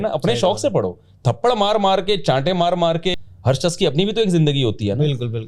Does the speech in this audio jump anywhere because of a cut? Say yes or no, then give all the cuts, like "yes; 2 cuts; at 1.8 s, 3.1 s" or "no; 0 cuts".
yes; 1 cut; at 3.1 s